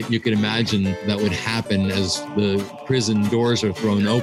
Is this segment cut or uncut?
cut